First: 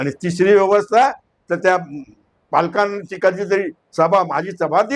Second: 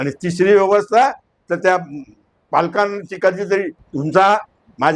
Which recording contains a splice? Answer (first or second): second